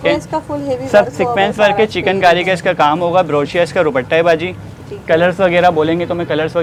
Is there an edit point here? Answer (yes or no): no